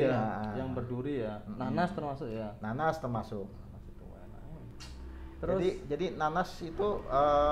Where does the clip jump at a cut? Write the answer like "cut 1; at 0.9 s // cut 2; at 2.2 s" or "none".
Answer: none